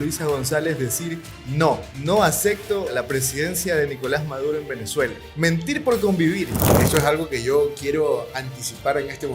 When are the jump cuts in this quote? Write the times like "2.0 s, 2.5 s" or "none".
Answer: 1.9 s, 2.9 s, 5.2 s, 6.7 s